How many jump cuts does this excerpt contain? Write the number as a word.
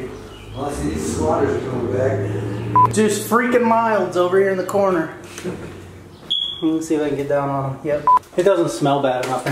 two